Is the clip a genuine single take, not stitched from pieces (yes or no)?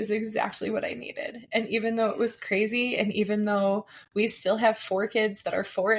yes